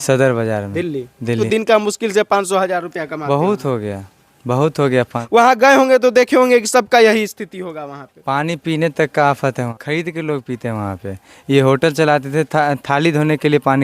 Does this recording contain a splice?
yes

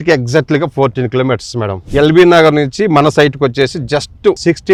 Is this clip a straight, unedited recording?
yes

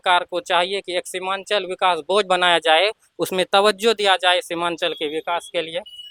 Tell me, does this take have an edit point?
no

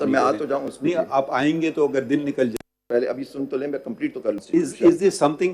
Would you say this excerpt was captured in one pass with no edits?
no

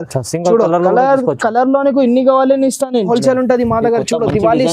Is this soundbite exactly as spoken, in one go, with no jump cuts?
no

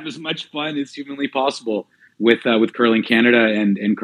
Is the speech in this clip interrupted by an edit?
no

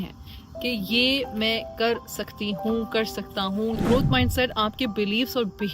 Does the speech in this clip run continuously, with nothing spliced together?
no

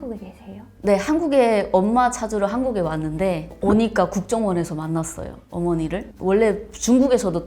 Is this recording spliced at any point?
no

